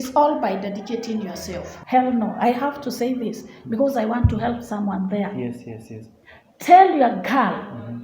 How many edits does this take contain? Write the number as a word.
one